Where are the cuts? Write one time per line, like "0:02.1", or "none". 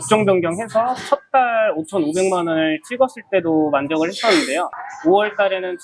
0:04.9